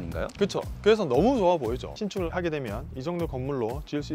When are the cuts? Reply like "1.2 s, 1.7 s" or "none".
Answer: 2.2 s